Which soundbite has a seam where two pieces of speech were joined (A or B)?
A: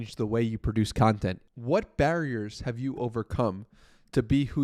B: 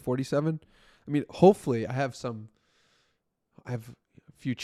A